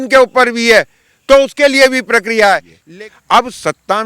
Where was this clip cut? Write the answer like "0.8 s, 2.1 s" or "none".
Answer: 2.8 s